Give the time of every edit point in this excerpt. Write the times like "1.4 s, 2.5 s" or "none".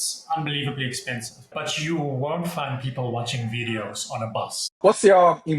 1.5 s, 4.7 s